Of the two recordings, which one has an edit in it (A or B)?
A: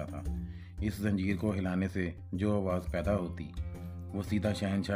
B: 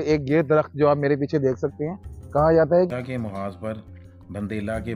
B